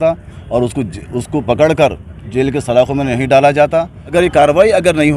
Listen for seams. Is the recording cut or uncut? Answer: cut